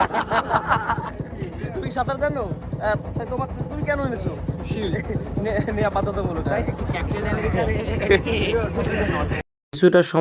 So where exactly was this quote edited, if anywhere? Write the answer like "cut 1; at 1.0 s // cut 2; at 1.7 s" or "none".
none